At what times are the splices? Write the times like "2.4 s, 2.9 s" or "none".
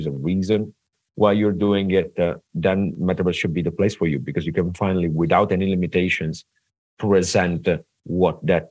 none